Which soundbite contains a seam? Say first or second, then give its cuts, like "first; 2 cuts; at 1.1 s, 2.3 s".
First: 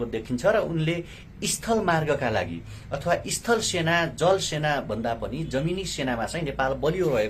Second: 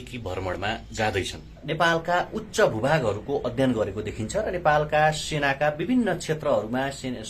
second; 1 cut; at 1.6 s